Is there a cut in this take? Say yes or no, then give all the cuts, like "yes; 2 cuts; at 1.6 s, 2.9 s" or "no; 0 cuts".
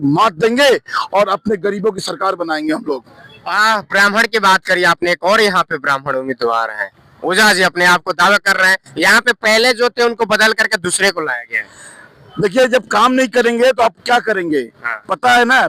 no; 0 cuts